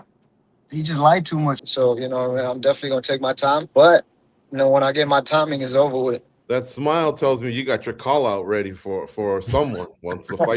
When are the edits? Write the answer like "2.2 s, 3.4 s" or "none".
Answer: 1.6 s, 3.7 s, 6.3 s